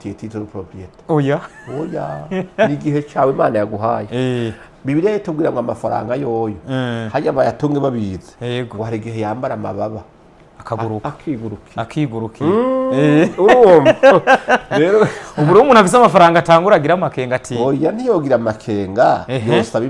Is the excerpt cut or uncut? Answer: uncut